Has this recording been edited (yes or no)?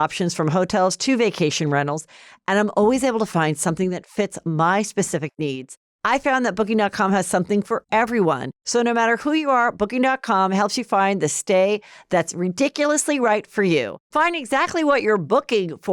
yes